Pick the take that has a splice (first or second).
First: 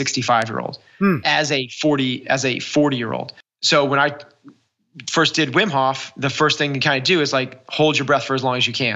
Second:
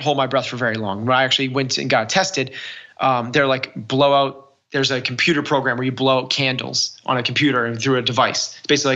first